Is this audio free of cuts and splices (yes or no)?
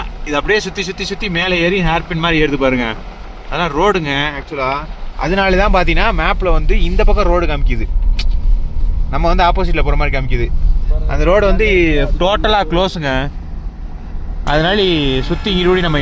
yes